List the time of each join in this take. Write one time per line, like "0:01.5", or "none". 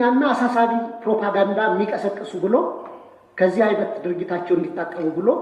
none